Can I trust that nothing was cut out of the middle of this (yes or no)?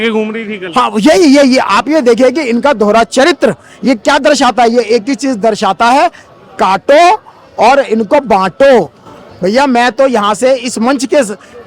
yes